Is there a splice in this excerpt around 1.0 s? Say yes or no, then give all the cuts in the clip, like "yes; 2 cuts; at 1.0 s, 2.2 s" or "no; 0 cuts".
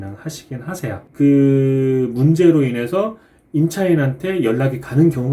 yes; 1 cut; at 1.0 s